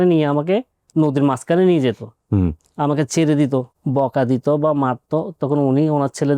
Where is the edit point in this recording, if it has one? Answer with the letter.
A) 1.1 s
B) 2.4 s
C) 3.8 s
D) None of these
C